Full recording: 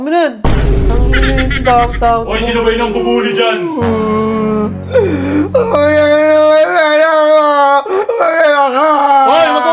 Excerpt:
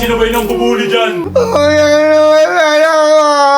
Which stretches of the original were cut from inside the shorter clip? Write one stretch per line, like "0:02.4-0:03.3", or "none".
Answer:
0:03.7-0:05.5